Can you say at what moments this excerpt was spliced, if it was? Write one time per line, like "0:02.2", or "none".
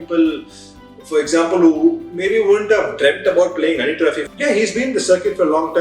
0:04.2